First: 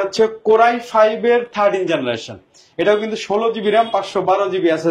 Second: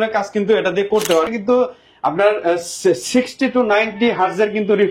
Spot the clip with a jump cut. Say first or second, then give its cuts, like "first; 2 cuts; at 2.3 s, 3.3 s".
second; 1 cut; at 1.3 s